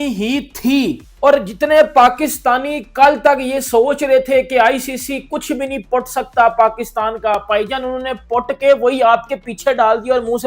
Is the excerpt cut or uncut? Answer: cut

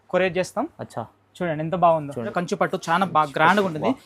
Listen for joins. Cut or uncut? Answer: cut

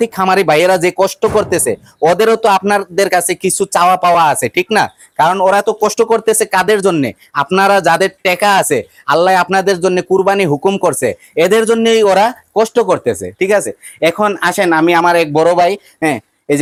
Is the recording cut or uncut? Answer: uncut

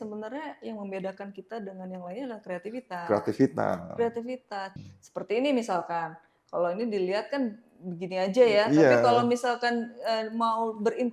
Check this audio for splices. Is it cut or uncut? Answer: cut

